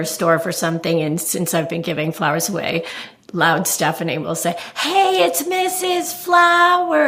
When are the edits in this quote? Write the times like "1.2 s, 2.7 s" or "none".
none